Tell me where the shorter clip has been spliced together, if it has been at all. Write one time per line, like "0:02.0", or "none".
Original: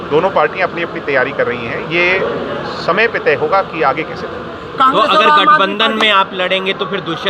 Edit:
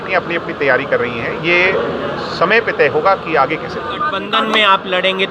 0:04.2